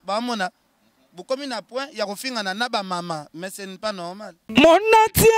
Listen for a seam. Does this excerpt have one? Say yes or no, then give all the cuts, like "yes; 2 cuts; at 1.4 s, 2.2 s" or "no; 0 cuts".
yes; 1 cut; at 4.3 s